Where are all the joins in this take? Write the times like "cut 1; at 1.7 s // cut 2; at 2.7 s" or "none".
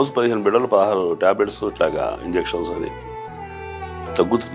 none